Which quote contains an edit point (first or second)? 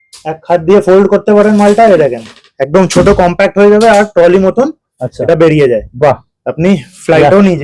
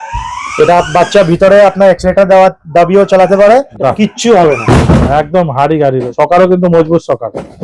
second